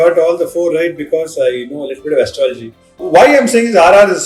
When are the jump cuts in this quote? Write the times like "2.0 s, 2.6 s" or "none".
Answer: 3.0 s